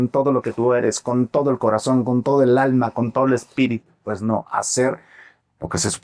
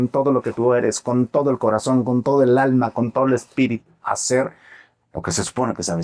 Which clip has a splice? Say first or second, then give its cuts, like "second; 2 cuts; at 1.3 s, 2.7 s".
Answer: second; 1 cut; at 4.0 s